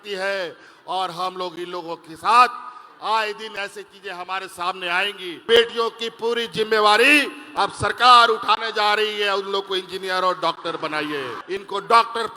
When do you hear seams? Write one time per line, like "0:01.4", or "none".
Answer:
0:05.4
0:11.4

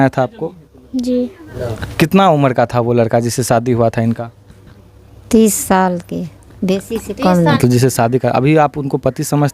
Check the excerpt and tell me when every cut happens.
0:01.4
0:07.6

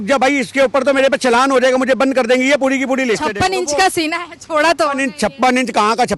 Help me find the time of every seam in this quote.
0:03.3

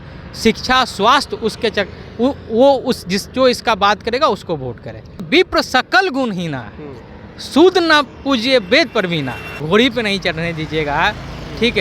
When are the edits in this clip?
0:05.3
0:09.5

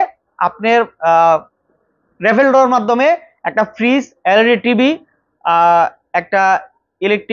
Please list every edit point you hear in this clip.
none

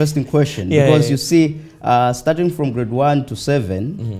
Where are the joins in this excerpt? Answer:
none

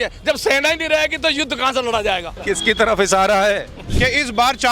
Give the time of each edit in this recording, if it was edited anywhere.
0:02.3
0:03.8

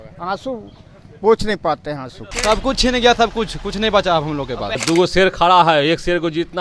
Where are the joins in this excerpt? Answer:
0:02.3
0:04.8

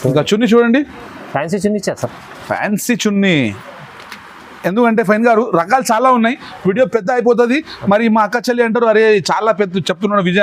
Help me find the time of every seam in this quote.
0:03.6

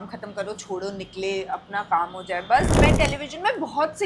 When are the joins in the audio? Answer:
0:02.8

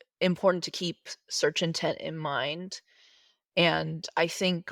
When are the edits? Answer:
none

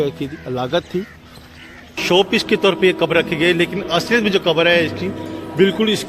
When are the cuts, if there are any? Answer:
0:02.0

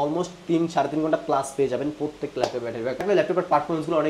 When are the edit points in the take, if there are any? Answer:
0:03.0

